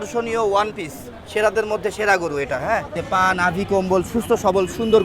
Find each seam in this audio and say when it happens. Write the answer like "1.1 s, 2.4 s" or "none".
3.0 s